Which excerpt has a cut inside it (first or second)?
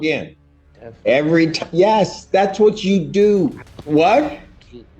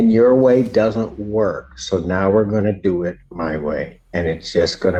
first